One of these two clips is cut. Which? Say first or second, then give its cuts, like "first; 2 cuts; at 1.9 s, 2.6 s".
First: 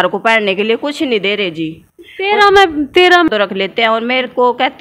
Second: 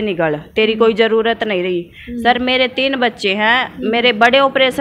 first; 1 cut; at 3.3 s